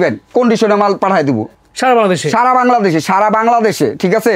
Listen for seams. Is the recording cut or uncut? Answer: uncut